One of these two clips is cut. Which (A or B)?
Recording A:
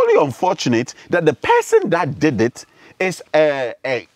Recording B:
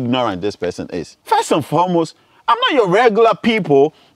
B